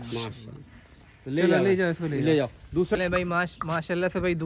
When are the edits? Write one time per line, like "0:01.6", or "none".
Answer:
0:03.0